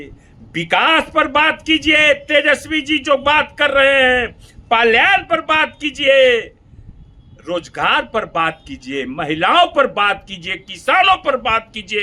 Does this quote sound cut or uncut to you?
uncut